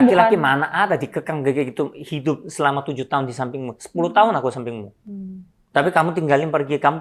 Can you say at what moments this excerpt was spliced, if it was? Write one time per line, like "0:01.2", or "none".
none